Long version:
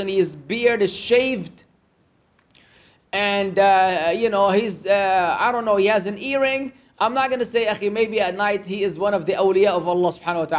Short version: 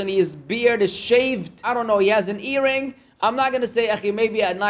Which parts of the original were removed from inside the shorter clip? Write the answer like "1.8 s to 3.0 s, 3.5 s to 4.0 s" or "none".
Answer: 1.6 s to 5.4 s